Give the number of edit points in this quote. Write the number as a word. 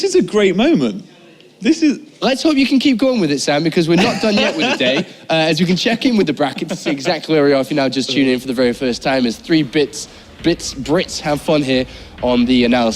one